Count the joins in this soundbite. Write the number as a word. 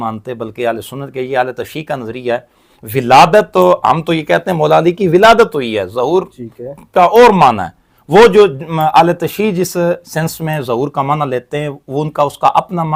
zero